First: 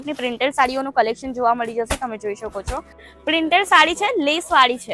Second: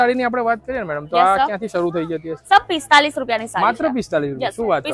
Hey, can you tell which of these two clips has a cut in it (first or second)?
first